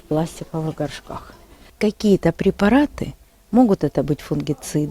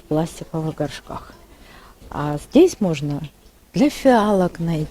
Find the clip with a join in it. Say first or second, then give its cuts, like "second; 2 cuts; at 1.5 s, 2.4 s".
first; 1 cut; at 1.6 s